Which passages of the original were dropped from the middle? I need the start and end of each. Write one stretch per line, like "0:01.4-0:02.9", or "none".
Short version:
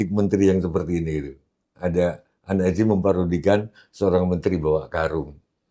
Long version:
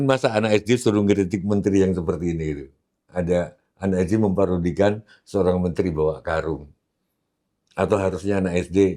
none